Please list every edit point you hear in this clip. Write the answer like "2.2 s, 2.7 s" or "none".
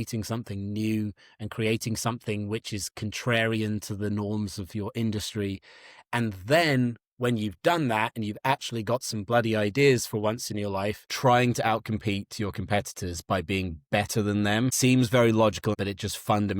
11.1 s, 14.7 s, 15.8 s